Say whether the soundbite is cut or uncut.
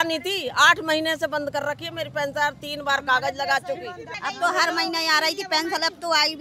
cut